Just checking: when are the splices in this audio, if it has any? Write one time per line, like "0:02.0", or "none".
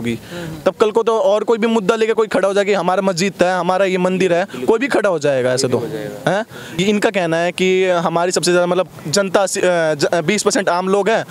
0:06.8